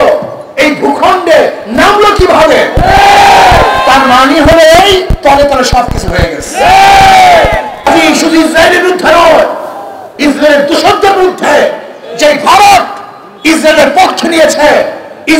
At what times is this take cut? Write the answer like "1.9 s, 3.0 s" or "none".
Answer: 7.9 s

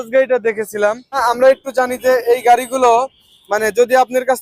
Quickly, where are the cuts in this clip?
1.2 s

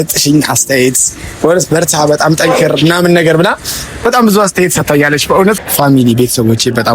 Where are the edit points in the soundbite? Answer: 5.6 s

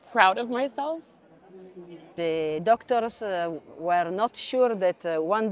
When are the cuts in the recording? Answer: 2.1 s

